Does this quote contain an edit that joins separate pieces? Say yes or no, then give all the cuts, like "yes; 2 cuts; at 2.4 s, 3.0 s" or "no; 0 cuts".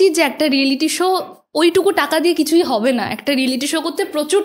no; 0 cuts